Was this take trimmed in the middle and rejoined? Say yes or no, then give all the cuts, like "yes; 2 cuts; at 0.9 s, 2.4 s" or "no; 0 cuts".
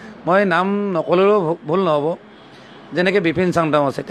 no; 0 cuts